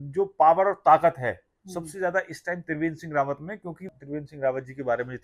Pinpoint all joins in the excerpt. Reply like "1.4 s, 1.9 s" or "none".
3.9 s